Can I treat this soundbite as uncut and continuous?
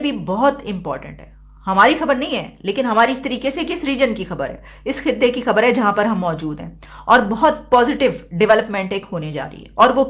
yes; 0 cuts

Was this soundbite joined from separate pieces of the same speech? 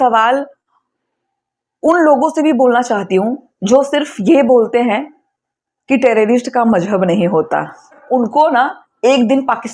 yes; 1 cut; at 8.0 s

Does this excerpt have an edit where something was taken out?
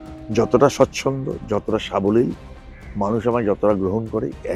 no; 0 cuts

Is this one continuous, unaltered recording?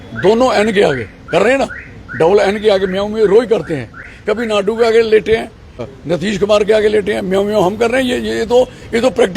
no; 2 cuts; at 4.2 s, 5.9 s

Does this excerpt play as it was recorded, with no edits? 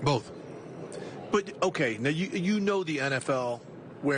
yes; 0 cuts

